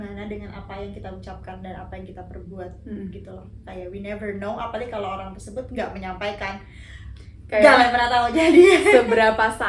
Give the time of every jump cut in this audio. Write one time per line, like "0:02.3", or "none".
none